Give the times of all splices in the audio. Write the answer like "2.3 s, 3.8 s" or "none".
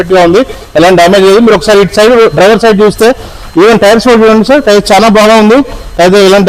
none

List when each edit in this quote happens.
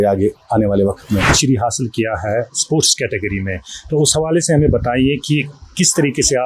1.4 s

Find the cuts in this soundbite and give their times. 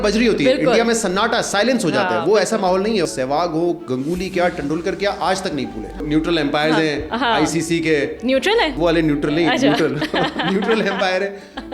3.1 s, 6.0 s, 8.8 s

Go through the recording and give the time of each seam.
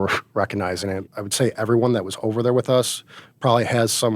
1.2 s

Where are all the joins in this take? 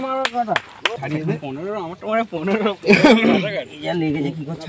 1.0 s

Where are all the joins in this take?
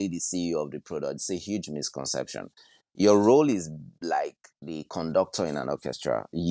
none

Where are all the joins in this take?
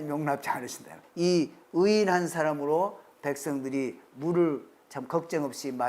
1.0 s

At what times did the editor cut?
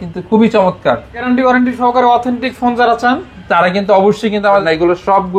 1.2 s, 4.6 s

